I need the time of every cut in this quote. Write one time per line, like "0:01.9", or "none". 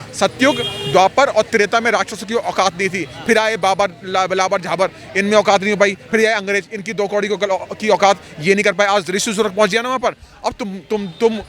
none